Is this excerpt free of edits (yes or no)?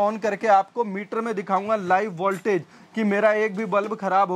yes